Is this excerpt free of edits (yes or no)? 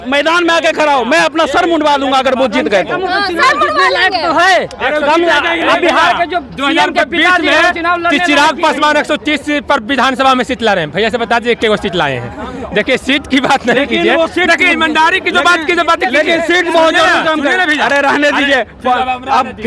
yes